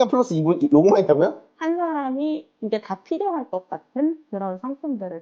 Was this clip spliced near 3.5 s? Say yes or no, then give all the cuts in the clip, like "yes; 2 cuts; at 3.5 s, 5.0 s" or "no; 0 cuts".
no; 1 cut; at 1.4 s